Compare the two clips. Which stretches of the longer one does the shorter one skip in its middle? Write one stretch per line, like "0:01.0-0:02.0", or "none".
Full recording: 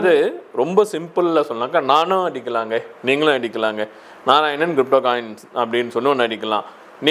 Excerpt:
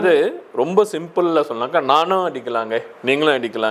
none